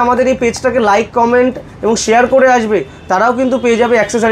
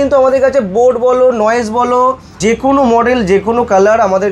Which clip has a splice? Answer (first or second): second